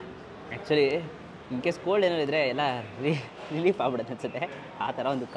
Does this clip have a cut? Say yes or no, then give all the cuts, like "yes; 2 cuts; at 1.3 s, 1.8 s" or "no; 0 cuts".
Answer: no; 0 cuts